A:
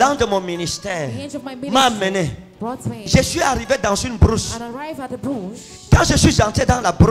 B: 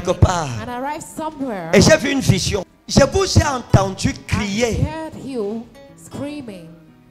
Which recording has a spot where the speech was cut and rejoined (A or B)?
B